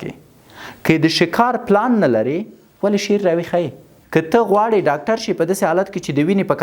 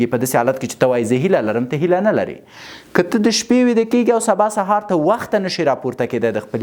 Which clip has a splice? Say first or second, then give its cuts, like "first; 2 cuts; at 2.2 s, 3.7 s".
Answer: first; 1 cut; at 3.9 s